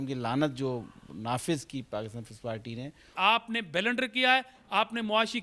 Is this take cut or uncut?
cut